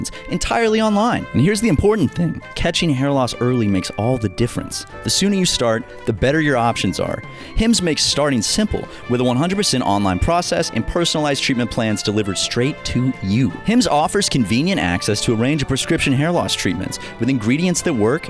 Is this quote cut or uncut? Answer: uncut